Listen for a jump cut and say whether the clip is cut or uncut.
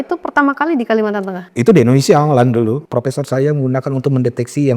cut